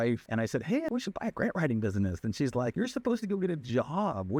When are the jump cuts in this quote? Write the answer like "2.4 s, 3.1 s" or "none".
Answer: none